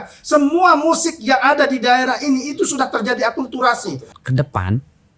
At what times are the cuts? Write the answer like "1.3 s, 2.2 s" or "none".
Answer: 4.2 s